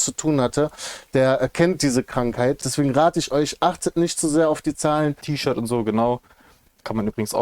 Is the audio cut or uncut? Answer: cut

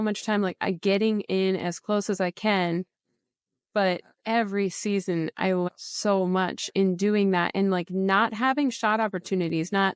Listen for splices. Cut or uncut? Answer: uncut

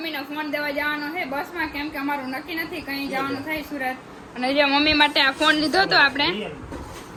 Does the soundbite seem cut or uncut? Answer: uncut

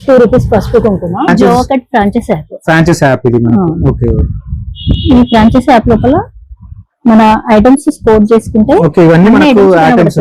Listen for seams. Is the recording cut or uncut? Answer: cut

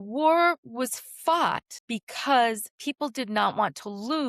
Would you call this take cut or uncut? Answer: cut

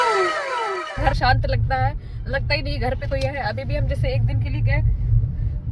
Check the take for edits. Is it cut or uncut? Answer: cut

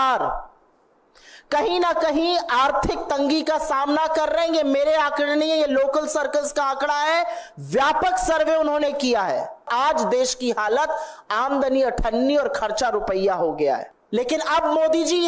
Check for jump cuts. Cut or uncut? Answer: cut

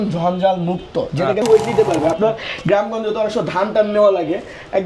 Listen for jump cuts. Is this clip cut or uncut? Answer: cut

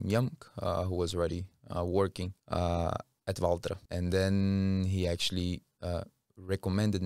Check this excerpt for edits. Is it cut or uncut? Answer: cut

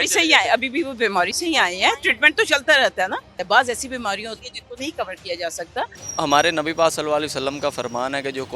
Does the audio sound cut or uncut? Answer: cut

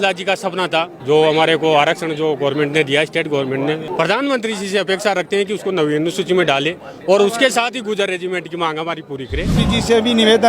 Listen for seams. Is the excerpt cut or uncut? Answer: cut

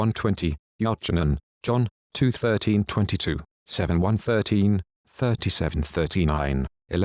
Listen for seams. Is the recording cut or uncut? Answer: uncut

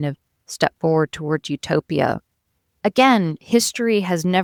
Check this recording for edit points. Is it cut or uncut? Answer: uncut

